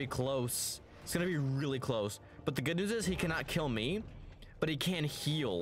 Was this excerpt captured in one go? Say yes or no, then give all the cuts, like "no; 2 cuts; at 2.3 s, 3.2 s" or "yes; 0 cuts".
yes; 0 cuts